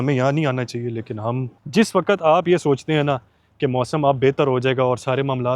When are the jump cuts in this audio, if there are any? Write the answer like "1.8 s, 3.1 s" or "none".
1.5 s

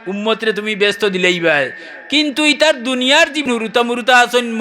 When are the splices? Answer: 3.4 s

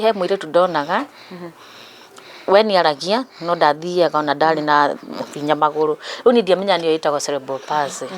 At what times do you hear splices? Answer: none

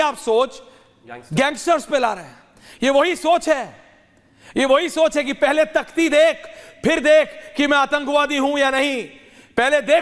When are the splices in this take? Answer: none

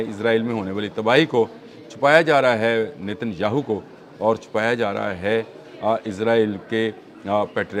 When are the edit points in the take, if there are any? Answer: none

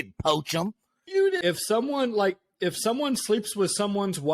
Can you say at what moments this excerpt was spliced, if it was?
1.4 s

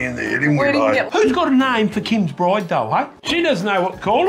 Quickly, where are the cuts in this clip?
1.1 s, 3.2 s

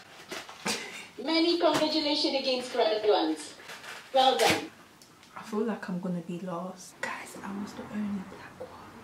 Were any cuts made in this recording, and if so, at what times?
4.7 s, 7.3 s

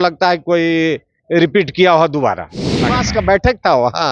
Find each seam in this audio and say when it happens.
3.0 s

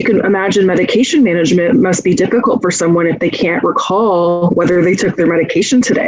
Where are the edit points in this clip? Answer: none

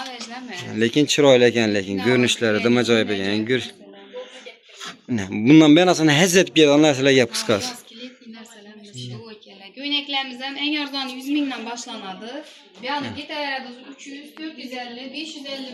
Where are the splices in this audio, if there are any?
none

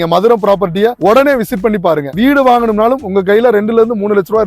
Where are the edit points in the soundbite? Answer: 2.1 s

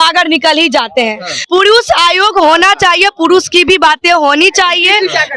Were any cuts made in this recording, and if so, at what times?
1.3 s

